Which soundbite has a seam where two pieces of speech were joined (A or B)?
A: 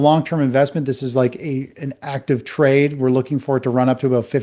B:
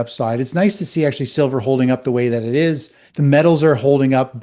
B